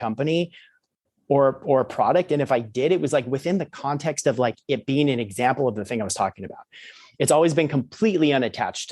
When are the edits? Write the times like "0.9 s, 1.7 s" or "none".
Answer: none